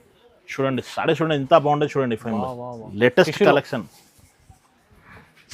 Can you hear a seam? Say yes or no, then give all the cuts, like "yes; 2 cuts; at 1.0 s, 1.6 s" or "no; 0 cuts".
yes; 1 cut; at 2.8 s